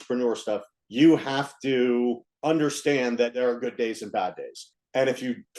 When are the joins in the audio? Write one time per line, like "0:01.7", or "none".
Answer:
0:03.3
0:04.7